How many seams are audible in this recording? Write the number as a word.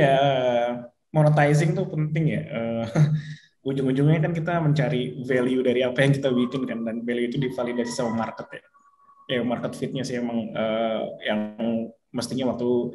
zero